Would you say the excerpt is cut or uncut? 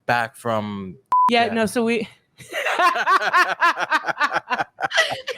cut